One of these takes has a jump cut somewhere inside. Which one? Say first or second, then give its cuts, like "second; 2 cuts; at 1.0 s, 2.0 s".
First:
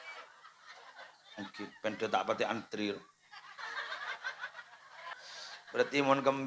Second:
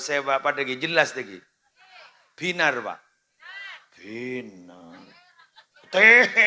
first; 1 cut; at 5.1 s